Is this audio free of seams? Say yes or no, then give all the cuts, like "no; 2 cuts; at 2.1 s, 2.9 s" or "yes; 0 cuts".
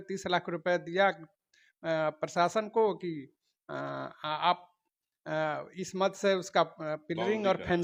yes; 0 cuts